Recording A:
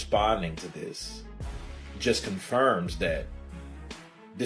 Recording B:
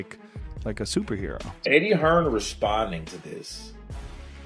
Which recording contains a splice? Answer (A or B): B